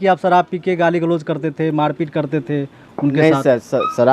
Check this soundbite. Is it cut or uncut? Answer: uncut